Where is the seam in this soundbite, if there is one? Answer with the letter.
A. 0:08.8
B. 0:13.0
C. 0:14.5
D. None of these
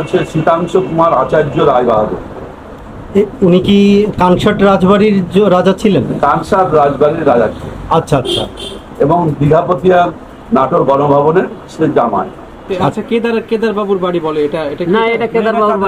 B